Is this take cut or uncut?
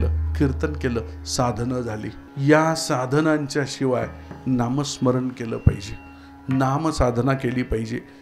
cut